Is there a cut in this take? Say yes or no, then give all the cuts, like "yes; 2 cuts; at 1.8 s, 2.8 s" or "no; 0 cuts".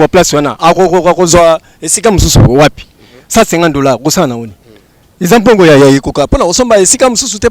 no; 0 cuts